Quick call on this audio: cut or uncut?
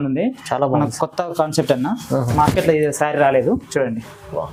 uncut